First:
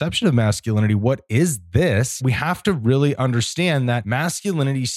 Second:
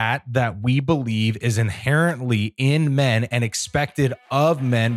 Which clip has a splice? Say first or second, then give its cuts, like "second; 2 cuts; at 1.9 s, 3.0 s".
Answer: first; 2 cuts; at 2.2 s, 4.0 s